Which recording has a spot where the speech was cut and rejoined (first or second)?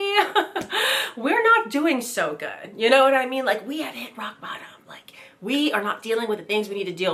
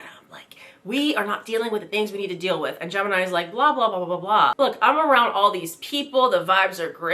second